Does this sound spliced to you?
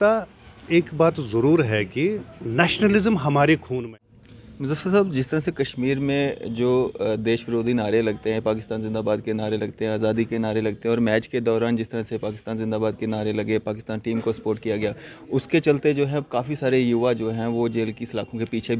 yes; 1 cut; at 3.7 s

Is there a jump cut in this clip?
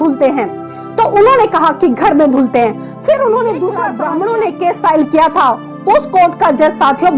yes; 1 cut; at 3.9 s

